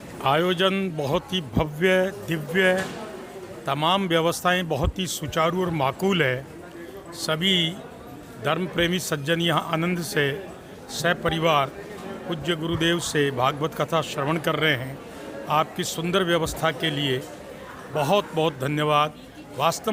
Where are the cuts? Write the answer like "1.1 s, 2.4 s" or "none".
none

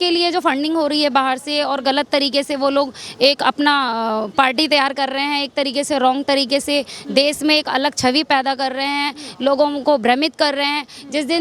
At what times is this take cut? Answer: none

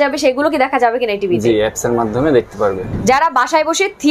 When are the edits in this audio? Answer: 2.9 s

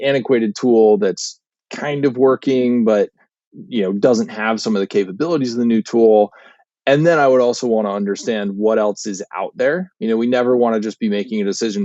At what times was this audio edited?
none

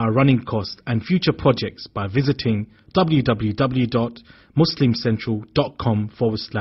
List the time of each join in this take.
none

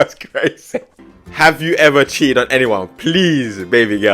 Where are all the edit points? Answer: 0.9 s

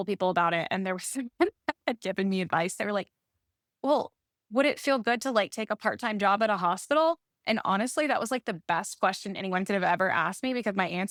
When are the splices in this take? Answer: none

